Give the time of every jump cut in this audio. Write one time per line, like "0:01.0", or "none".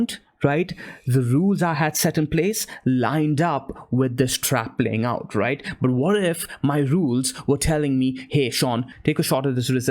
0:08.9

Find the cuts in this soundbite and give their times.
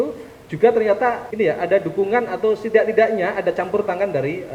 0:01.2

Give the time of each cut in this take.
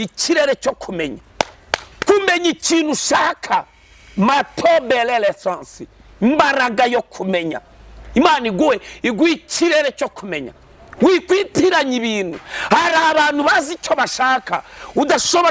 none

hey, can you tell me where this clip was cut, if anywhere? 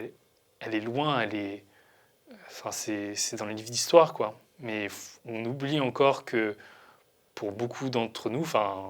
none

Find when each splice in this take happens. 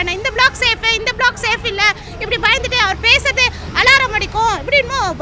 none

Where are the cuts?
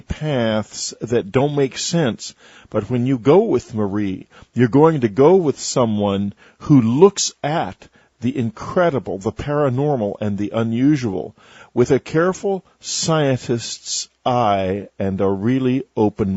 0:01.8

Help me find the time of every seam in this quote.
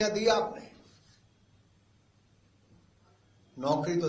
none

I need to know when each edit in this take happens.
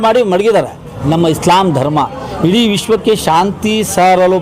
0:01.0

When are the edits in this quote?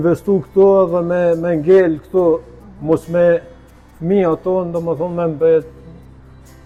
none

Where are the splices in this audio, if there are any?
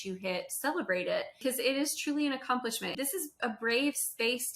0:01.4
0:02.9

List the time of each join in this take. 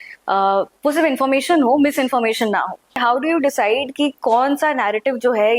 0:03.0

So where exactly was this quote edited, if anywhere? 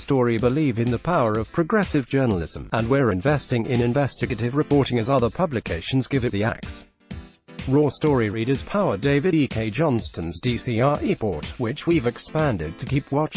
none

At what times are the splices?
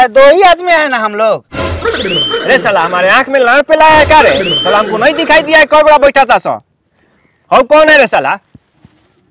none

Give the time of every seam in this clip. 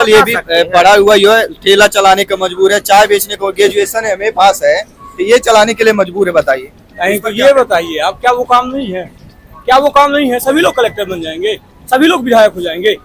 none

